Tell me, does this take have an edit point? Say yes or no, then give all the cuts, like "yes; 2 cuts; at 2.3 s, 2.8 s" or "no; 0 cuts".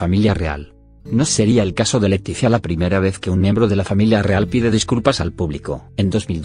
yes; 1 cut; at 4.0 s